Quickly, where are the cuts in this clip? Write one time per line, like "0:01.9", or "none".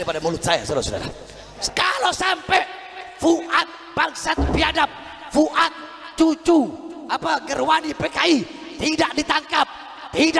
0:01.5